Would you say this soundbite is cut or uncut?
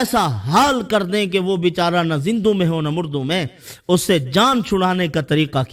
uncut